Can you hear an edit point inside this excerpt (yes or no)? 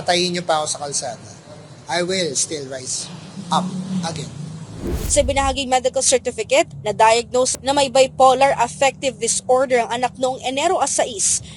yes